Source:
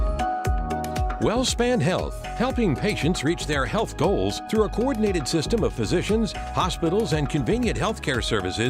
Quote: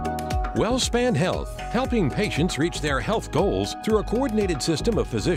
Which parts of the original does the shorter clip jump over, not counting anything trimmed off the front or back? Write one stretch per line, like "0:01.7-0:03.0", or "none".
none